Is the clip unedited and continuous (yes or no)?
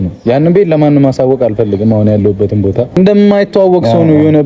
no